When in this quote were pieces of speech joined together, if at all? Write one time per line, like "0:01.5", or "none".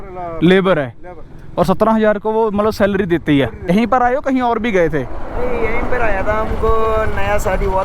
0:03.7

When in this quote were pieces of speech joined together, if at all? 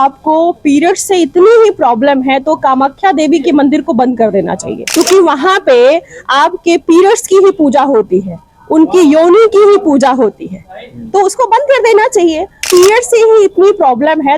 0:04.7
0:12.6

